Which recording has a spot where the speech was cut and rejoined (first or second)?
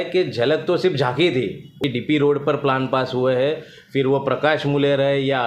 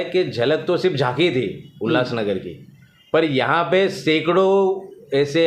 first